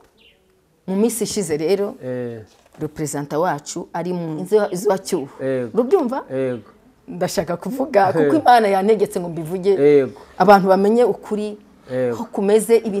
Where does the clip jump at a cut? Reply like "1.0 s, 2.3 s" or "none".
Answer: 4.4 s